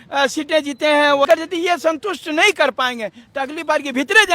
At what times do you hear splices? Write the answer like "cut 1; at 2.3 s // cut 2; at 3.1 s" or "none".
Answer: cut 1; at 1.3 s